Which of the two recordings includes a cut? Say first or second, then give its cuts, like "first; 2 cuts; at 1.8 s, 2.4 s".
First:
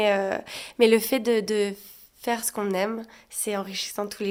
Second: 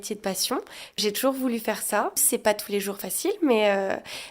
second; 2 cuts; at 1.0 s, 2.2 s